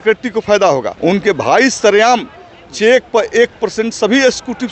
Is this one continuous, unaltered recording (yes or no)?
no